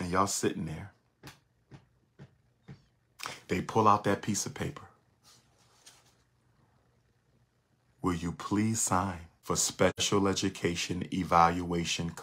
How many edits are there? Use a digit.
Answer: 1